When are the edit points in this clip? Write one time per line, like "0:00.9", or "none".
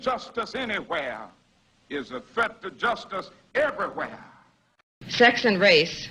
0:04.8